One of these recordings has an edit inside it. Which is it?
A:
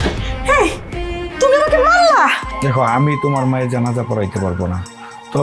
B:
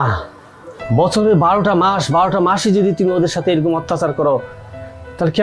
A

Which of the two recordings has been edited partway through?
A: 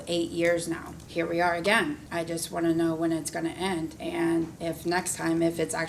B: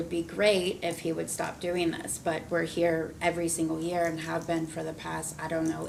A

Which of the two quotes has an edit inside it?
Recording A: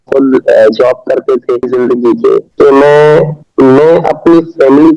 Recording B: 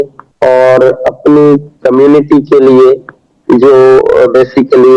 A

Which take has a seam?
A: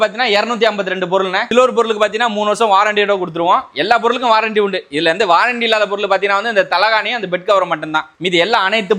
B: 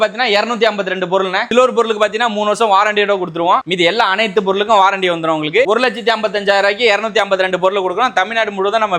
B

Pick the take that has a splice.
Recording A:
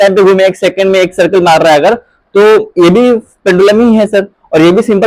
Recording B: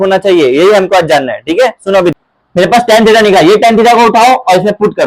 B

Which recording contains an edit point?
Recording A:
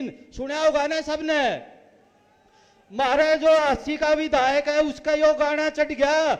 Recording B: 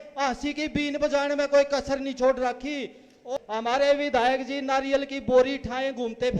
B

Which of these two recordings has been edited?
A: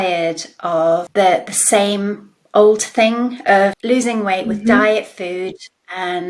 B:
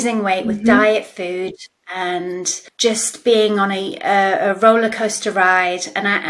A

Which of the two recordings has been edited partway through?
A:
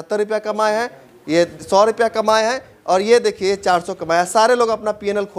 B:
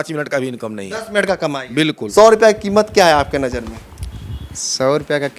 B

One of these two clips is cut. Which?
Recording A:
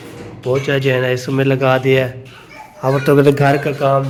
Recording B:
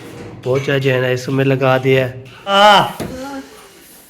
B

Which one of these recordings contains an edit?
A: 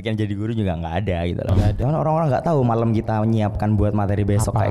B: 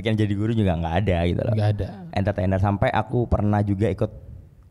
A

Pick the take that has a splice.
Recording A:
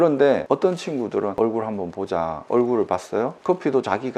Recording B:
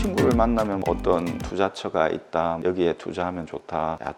A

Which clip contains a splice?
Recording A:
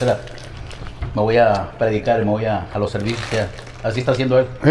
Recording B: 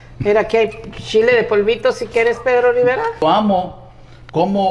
B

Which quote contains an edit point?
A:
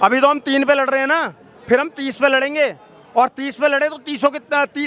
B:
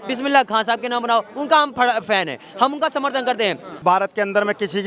B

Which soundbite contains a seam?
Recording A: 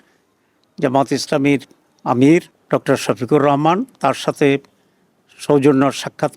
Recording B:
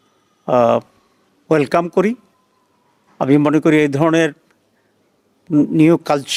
A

